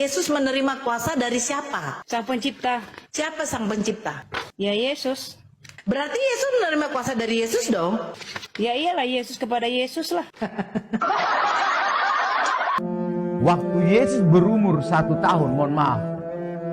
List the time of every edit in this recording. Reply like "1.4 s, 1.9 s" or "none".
12.8 s